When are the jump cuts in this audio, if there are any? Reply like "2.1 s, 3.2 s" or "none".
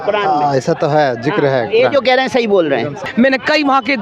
3.0 s